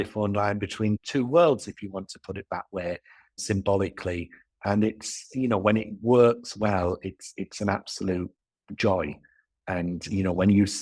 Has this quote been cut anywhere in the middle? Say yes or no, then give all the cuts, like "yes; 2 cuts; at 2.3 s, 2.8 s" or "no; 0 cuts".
yes; 1 cut; at 1.0 s